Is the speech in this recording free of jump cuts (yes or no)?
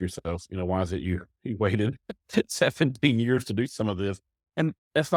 yes